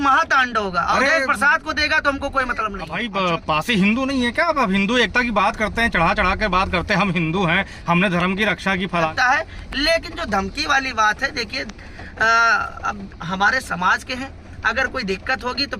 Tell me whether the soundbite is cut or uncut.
cut